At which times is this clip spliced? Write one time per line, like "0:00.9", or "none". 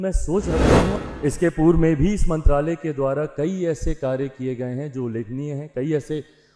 0:00.9